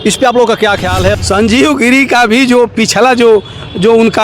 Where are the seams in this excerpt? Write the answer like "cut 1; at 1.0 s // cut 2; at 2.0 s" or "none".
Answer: cut 1; at 1.1 s